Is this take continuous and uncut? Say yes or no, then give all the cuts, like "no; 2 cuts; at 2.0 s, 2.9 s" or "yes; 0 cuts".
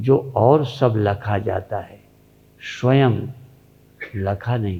yes; 0 cuts